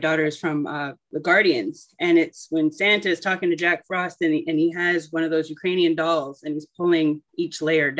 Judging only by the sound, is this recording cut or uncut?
cut